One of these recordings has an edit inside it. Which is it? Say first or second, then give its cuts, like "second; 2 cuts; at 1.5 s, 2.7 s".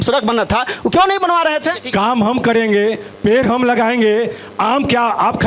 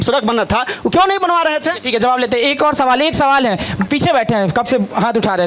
first; 1 cut; at 1.8 s